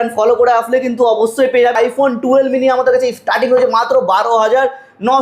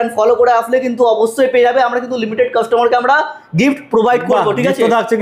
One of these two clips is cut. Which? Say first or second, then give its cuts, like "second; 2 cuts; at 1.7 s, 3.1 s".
first; 1 cut; at 1.7 s